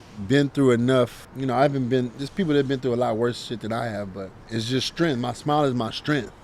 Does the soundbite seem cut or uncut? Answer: cut